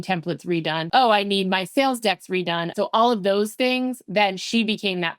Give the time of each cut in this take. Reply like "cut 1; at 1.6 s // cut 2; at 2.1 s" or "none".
cut 1; at 0.9 s // cut 2; at 2.7 s